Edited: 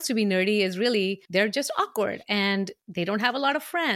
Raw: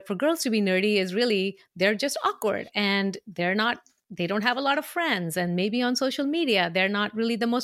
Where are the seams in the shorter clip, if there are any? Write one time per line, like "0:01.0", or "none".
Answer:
0:01.2
0:02.8